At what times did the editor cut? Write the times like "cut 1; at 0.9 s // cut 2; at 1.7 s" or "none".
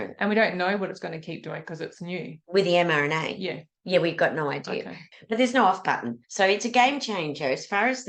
cut 1; at 5.0 s